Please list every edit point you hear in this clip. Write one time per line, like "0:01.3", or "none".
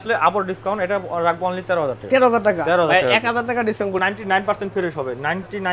0:04.0